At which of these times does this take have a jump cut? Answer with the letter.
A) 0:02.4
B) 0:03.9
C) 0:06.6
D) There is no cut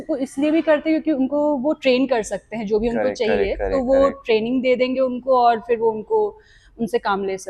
D